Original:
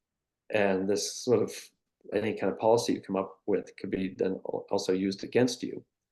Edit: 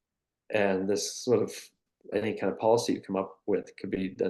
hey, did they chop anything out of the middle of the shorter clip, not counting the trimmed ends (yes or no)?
no